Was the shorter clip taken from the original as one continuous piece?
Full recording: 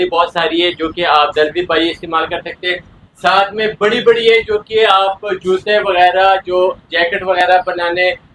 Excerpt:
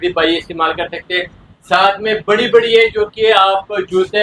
yes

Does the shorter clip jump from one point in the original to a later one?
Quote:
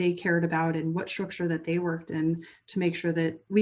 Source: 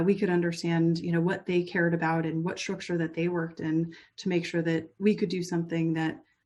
no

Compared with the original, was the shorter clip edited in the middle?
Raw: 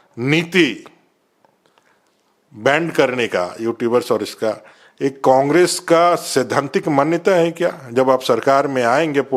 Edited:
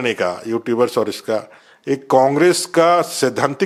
no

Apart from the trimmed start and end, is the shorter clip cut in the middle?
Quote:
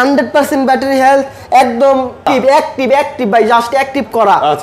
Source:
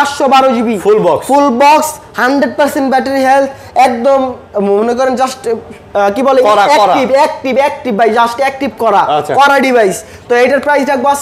yes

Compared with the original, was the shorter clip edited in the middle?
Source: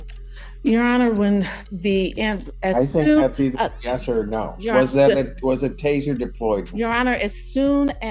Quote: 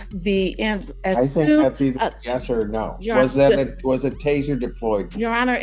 no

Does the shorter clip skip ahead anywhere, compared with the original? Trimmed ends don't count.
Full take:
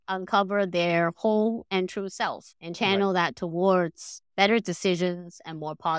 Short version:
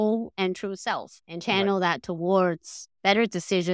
no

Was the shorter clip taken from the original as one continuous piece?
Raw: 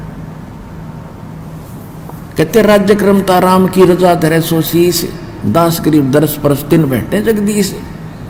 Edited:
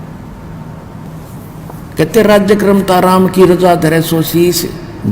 no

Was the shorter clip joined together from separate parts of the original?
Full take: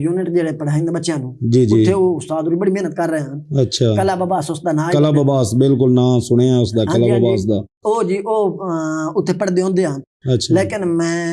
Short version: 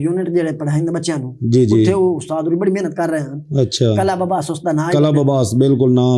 no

